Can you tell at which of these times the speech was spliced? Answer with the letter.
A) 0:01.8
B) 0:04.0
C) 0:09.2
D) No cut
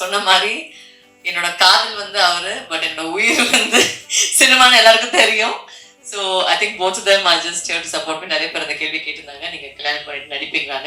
D